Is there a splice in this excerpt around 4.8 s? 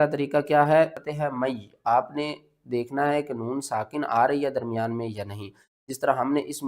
no; 1 cut; at 1.0 s

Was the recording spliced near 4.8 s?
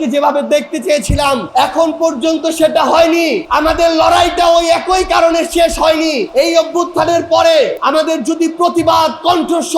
no; 4 cuts; at 1.5 s, 3.4 s, 6.2 s, 7.8 s

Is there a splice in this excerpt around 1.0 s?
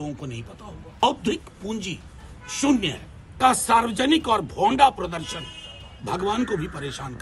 yes; 2 cuts; at 1.0 s, 3.3 s

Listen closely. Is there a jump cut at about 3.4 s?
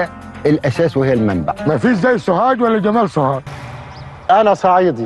yes; 1 cut; at 3.4 s

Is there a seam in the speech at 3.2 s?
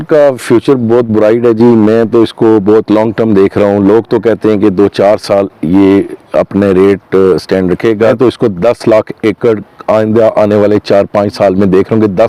no; 1 cut; at 8.2 s

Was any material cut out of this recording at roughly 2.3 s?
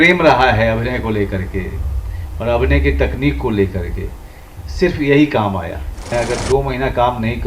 no; 1 cut; at 5.9 s

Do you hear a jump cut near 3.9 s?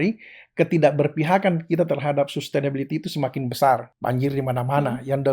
yes; 1 cut; at 3.9 s

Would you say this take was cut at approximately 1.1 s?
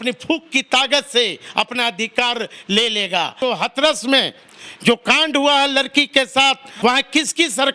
no; 2 cuts; at 3.4 s, 6.7 s

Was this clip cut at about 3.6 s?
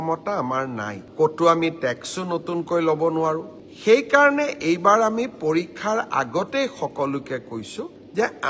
yes; 1 cut; at 3.6 s

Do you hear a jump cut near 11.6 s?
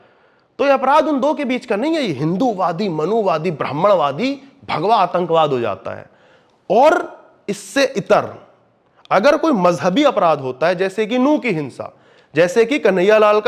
no; 0 cuts

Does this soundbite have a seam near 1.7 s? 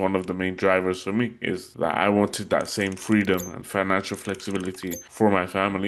yes; 2 cuts; at 1.7 s, 5.0 s

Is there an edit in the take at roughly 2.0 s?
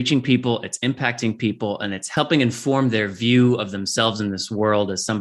yes; 1 cut; at 2.0 s

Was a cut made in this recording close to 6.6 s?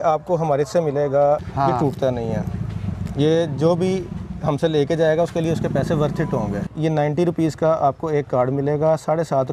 yes; 2 cuts; at 1.5 s, 6.6 s

